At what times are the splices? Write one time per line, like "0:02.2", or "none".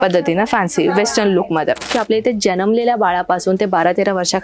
0:01.9